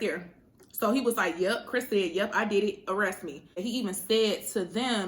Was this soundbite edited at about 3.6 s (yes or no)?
yes